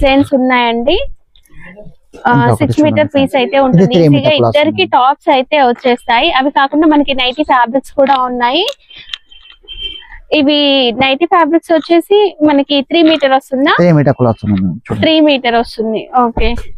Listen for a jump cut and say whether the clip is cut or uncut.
uncut